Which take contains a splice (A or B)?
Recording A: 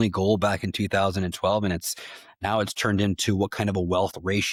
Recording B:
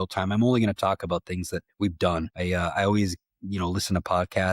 B